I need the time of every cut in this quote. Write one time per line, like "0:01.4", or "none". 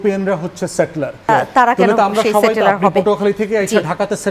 0:01.3